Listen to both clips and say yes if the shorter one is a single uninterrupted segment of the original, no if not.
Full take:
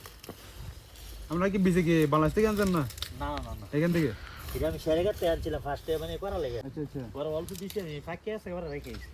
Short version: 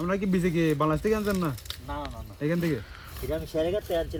yes